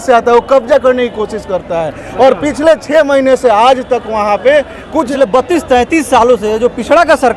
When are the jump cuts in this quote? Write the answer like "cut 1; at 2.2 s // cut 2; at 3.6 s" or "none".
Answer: cut 1; at 5.1 s